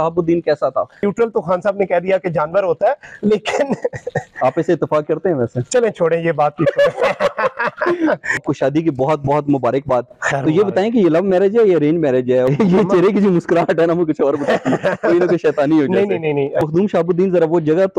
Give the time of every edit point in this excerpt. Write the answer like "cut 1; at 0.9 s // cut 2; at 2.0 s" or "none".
cut 1; at 1.0 s // cut 2; at 8.4 s // cut 3; at 12.5 s // cut 4; at 16.6 s